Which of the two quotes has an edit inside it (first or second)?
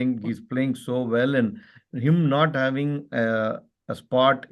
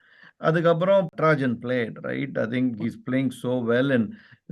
second